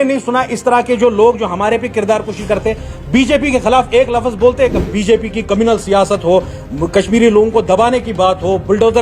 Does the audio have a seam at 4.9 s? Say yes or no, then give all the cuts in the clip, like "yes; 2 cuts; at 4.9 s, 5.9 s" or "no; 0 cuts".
yes; 1 cut; at 4.9 s